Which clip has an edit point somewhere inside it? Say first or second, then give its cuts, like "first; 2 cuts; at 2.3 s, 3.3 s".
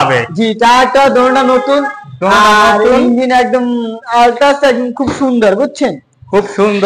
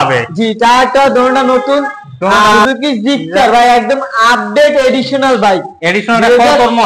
second; 1 cut; at 2.6 s